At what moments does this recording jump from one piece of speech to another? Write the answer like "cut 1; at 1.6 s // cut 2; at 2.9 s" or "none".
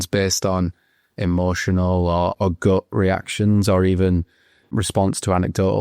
cut 1; at 2.3 s // cut 2; at 4.7 s